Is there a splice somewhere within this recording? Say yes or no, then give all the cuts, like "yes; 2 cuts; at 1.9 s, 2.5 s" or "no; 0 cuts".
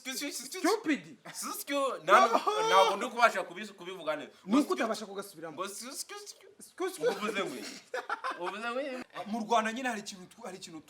yes; 1 cut; at 9.0 s